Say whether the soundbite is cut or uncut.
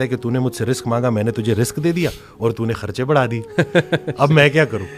uncut